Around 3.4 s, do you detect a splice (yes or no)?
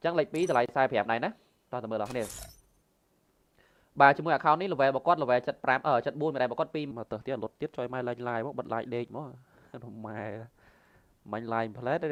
no